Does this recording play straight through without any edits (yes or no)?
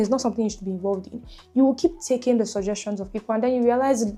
yes